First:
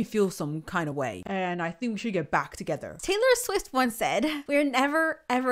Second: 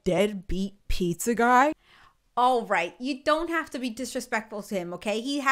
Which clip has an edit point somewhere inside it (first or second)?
first